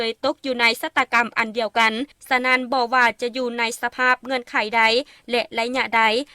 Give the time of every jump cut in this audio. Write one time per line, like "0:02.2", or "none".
0:02.1